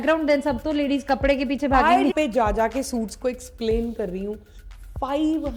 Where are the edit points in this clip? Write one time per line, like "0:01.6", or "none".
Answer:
0:02.1